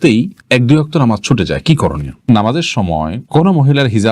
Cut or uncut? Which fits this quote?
cut